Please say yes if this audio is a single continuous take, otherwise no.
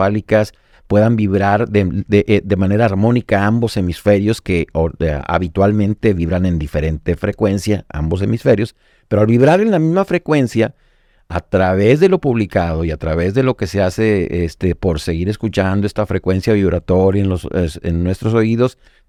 yes